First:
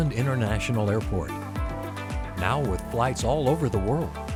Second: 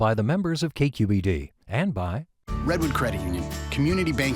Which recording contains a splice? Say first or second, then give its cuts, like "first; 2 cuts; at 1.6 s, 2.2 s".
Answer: second; 1 cut; at 2.3 s